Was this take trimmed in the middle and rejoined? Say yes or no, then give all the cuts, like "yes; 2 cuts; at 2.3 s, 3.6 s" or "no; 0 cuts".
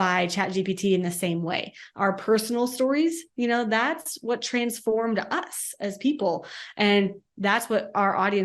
no; 0 cuts